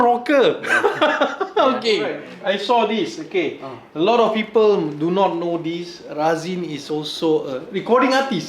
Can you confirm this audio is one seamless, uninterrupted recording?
no; 1 cut; at 2.3 s

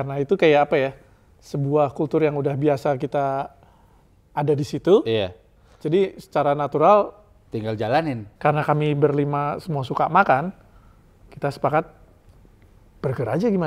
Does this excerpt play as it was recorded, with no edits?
no; 1 cut; at 8.3 s

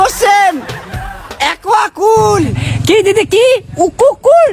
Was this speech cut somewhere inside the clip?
no; 0 cuts

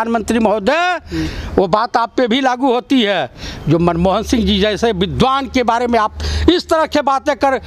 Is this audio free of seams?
yes; 0 cuts

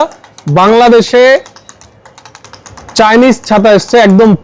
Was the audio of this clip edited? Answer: no; 0 cuts

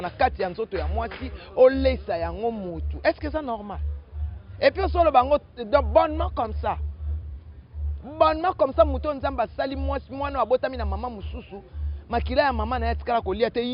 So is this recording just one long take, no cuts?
yes; 0 cuts

